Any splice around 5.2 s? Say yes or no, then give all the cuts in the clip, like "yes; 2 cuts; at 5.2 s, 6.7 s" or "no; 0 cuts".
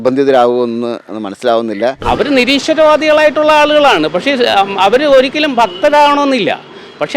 no; 1 cut; at 2.0 s